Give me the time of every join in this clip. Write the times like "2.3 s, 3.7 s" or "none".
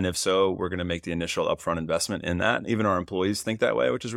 none